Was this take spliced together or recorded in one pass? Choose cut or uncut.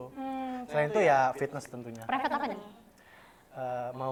uncut